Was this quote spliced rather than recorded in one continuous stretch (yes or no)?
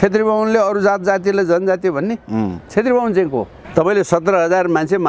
yes